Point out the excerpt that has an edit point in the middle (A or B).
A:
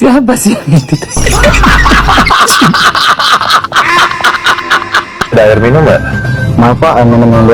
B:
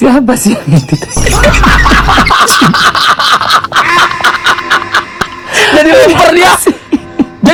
A